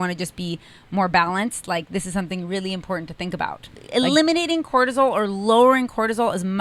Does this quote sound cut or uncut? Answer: cut